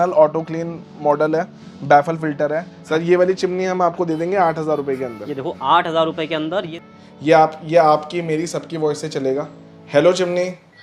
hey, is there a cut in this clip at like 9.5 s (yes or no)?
no